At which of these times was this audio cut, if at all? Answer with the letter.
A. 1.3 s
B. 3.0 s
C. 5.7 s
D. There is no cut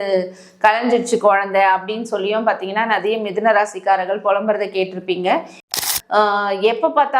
C